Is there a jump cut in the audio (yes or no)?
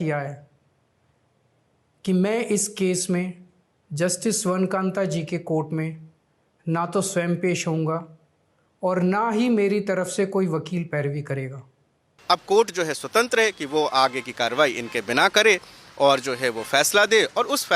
yes